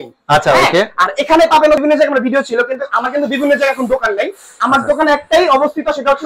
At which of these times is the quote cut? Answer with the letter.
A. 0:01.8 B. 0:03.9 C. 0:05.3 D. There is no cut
A